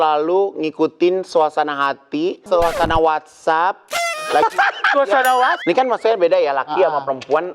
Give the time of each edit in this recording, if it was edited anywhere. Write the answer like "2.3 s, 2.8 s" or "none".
2.4 s, 5.6 s